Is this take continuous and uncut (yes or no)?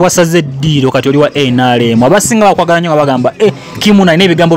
yes